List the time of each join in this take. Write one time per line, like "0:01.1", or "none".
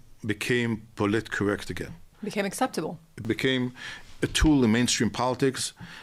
0:02.1
0:03.2